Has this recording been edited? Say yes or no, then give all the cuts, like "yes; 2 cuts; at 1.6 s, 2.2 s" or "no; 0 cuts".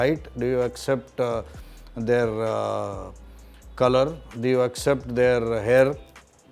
no; 0 cuts